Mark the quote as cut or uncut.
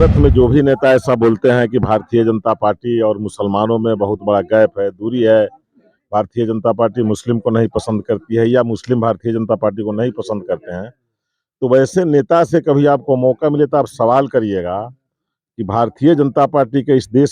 uncut